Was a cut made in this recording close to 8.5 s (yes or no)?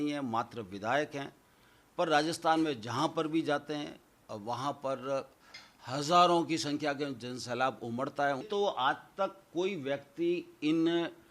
yes